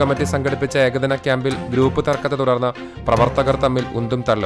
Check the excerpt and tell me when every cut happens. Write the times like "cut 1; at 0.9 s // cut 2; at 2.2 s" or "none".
none